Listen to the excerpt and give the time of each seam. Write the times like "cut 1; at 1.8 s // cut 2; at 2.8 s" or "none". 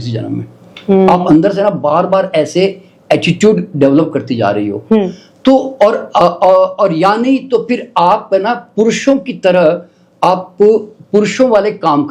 none